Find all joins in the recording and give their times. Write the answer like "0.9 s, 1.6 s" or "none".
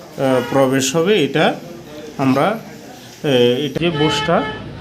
3.8 s